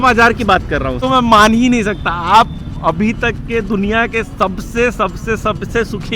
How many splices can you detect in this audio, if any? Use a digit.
1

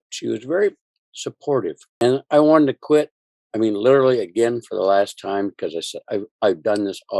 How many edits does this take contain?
1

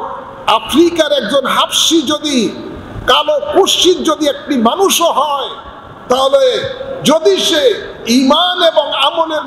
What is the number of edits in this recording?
0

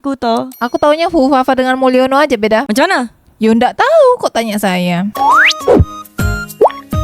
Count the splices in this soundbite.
1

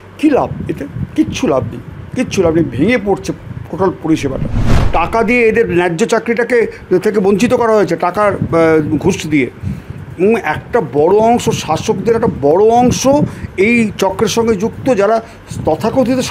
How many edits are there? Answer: 1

